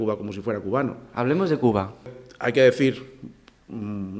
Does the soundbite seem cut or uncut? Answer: cut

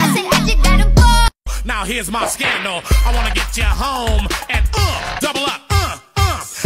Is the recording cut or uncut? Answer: cut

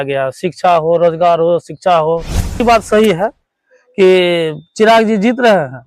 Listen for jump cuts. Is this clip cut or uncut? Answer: cut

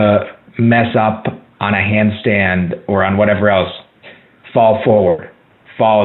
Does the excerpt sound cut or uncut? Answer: uncut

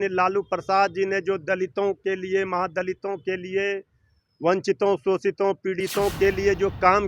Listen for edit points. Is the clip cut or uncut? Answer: uncut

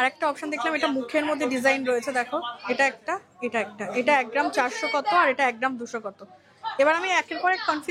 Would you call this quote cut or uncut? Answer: uncut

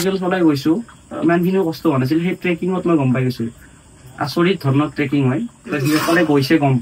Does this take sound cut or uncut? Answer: uncut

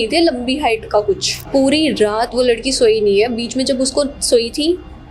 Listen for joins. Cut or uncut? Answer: cut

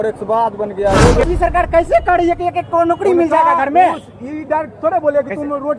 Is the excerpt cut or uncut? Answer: cut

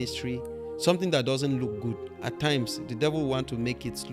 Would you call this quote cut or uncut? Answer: uncut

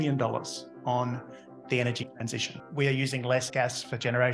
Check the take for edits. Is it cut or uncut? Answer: cut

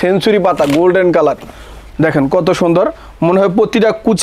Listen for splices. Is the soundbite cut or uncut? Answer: uncut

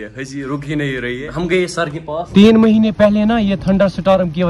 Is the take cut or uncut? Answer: cut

